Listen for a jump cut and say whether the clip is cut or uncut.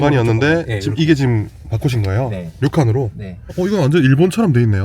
cut